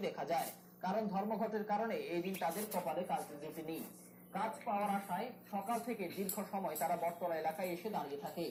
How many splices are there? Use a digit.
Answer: 0